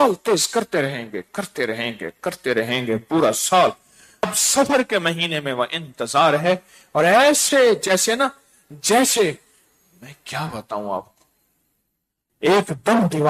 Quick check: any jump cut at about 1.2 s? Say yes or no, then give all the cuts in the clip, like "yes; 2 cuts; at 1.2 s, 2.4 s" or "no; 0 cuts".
no; 1 cut; at 4.2 s